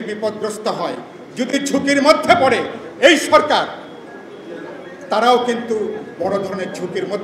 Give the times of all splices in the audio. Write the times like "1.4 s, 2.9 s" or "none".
none